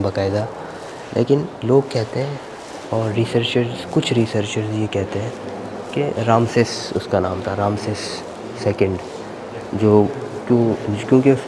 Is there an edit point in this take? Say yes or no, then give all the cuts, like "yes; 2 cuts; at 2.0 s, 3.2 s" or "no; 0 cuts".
no; 0 cuts